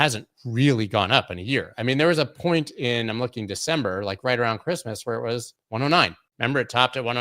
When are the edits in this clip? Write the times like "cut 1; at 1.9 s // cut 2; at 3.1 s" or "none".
cut 1; at 5.6 s // cut 2; at 6.2 s